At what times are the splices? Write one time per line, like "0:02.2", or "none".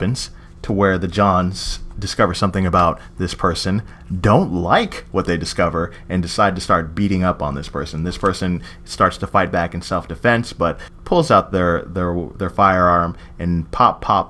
none